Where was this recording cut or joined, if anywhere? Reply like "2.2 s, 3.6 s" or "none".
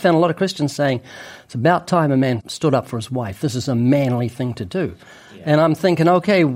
2.5 s